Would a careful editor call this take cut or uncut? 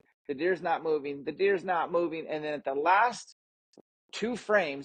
uncut